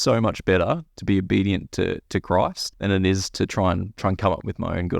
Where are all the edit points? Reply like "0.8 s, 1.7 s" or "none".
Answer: 2.7 s, 3.9 s